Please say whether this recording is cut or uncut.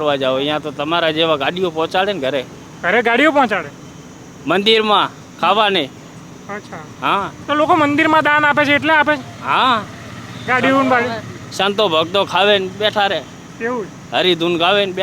uncut